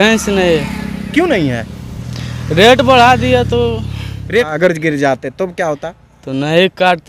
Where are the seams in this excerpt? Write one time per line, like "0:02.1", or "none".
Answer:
0:04.5